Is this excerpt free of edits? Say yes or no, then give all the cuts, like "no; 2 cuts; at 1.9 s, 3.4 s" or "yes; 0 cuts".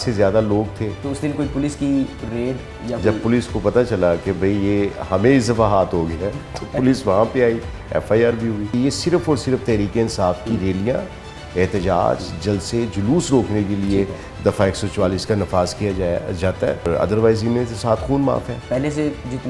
no; 4 cuts; at 1.0 s, 8.7 s, 16.8 s, 18.6 s